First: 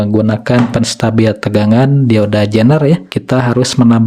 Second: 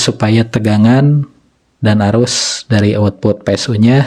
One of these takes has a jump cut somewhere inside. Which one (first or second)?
first